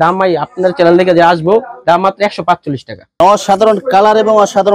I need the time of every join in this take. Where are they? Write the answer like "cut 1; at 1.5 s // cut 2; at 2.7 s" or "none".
cut 1; at 3.2 s